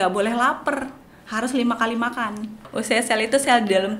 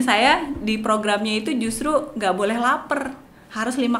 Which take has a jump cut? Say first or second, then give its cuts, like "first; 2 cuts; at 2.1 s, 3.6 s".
first; 1 cut; at 2.7 s